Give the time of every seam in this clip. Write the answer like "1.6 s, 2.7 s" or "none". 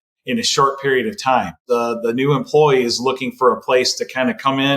1.6 s